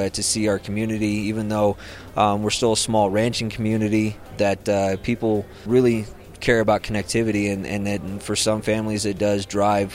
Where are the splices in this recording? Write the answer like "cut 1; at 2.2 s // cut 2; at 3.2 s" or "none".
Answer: cut 1; at 4.2 s // cut 2; at 5.6 s